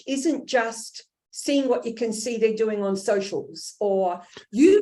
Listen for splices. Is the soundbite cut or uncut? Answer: uncut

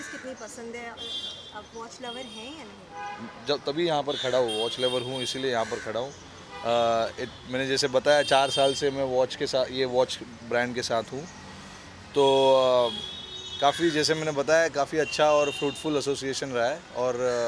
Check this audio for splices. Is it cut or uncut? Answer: uncut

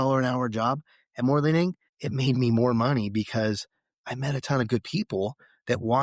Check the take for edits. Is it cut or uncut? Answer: uncut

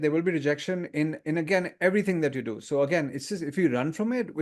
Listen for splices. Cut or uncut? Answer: uncut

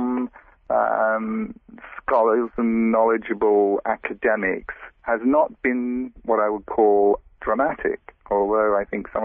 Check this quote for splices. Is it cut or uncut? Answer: uncut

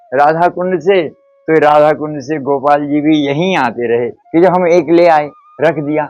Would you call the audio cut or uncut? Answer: cut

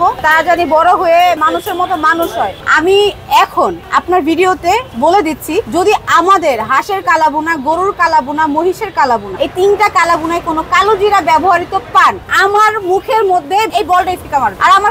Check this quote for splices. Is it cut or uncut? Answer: cut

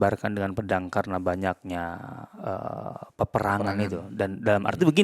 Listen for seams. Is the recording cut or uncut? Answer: uncut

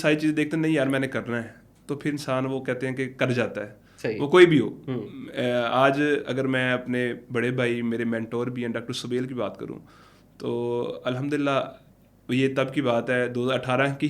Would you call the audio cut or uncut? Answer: uncut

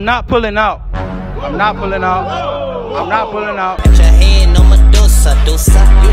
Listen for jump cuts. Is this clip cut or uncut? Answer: uncut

